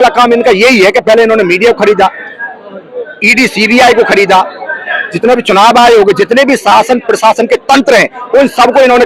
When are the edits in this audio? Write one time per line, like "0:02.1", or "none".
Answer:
none